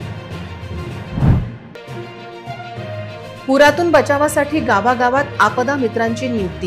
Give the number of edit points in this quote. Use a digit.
1